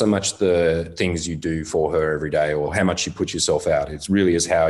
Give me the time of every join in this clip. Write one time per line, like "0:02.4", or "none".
0:00.9
0:02.7

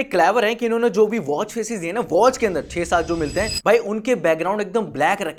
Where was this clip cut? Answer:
none

